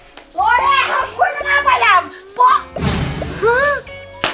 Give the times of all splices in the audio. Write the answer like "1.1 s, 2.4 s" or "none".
none